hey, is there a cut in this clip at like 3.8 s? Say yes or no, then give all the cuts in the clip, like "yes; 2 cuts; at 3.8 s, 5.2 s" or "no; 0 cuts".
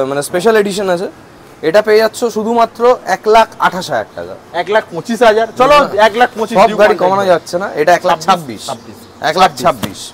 no; 0 cuts